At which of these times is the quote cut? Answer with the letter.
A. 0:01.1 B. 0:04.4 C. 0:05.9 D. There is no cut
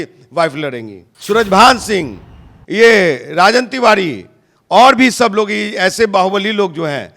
A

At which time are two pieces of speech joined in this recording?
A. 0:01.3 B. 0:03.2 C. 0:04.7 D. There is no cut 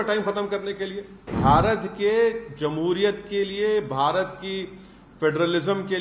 A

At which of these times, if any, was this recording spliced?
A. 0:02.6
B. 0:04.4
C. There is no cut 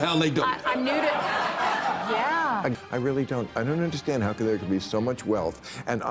A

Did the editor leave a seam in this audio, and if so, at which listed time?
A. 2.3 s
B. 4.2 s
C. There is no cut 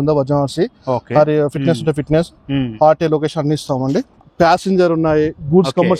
B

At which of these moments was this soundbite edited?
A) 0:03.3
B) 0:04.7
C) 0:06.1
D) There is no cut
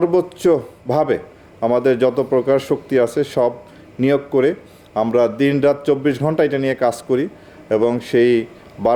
D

